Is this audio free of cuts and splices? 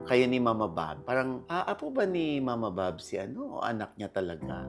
yes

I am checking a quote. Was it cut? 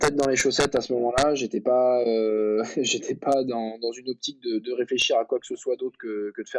no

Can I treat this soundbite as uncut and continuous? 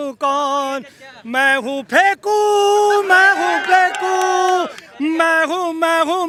yes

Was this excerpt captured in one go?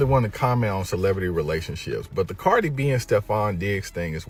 yes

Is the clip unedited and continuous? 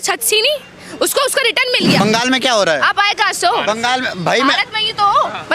no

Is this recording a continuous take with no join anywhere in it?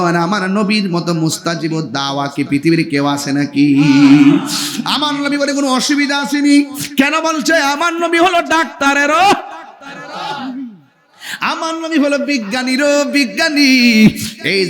yes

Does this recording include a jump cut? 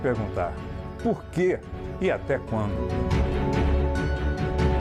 no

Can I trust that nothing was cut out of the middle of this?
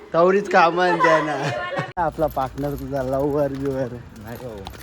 no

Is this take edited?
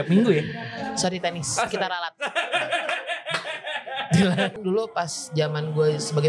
yes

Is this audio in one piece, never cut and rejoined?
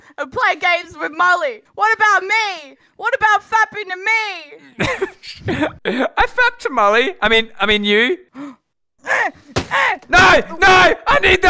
no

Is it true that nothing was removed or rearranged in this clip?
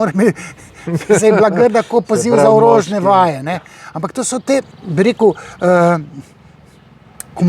yes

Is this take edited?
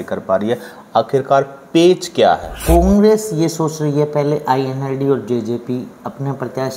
yes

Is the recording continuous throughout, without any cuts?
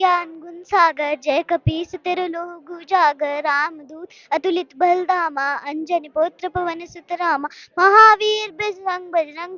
yes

